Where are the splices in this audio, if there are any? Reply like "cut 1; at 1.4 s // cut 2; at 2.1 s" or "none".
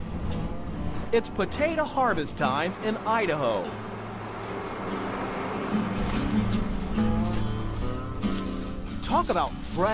cut 1; at 5.7 s